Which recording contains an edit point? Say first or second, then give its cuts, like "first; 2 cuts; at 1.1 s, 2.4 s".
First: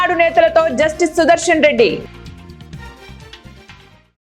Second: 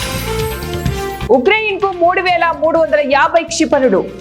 second; 1 cut; at 1.2 s